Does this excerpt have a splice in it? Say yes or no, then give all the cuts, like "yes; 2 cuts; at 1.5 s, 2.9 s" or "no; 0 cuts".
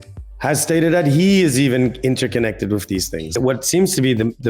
yes; 1 cut; at 3.4 s